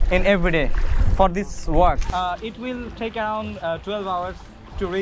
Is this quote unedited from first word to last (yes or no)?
no